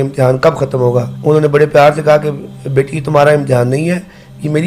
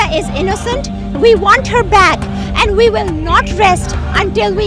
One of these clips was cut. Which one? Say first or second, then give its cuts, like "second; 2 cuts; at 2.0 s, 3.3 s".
first; 1 cut; at 1.1 s